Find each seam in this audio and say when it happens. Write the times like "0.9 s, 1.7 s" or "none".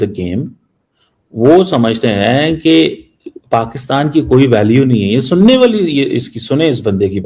none